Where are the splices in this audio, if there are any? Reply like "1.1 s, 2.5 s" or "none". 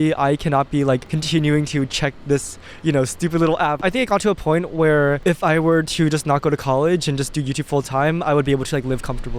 1.1 s, 3.8 s, 5.2 s